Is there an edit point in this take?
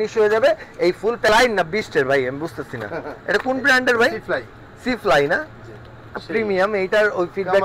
yes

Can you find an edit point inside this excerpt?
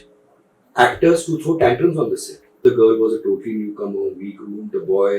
yes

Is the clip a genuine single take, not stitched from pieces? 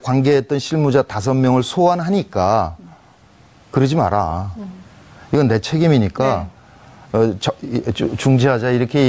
yes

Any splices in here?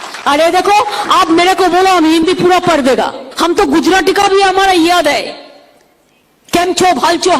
yes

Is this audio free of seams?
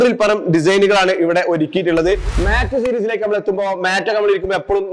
no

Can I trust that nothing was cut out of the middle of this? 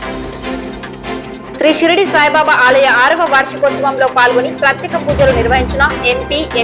no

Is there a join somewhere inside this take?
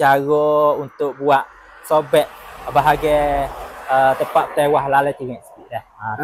no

